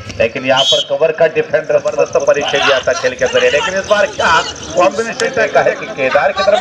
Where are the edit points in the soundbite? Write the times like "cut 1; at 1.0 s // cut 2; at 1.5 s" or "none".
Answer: cut 1; at 2.0 s // cut 2; at 5.4 s